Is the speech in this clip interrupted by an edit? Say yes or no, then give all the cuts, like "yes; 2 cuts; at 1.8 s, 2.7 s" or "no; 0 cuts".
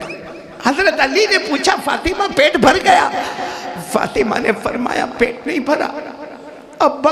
no; 0 cuts